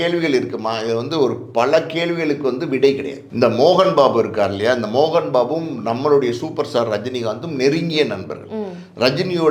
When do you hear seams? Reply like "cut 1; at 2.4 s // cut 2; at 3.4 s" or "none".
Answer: cut 1; at 3.3 s